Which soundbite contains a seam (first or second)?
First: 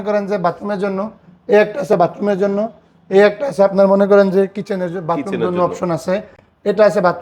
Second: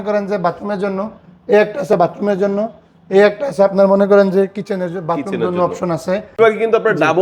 second